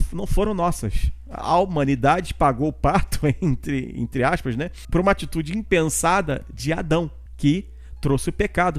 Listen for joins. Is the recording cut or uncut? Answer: cut